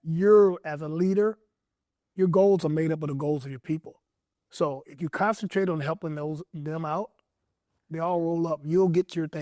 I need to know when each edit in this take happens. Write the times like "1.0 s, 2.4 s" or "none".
none